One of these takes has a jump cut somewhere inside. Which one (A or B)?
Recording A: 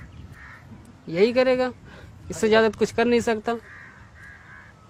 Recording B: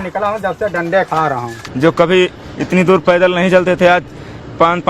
B